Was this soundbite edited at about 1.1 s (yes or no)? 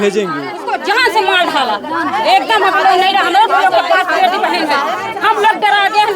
no